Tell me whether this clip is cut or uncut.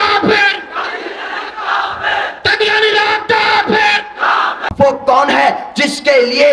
cut